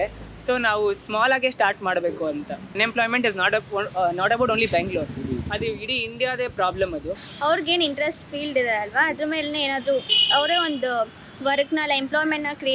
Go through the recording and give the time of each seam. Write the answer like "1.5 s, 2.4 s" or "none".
2.7 s, 7.2 s